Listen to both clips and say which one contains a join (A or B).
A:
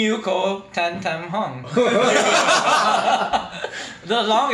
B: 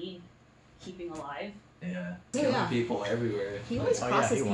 B